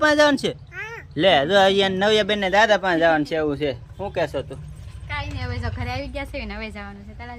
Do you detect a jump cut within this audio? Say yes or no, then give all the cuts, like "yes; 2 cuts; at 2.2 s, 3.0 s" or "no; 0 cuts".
no; 0 cuts